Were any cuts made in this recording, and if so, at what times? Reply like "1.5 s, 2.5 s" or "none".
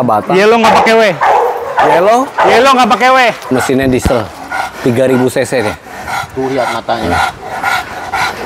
3.5 s